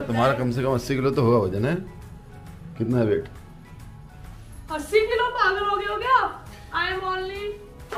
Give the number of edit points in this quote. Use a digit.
0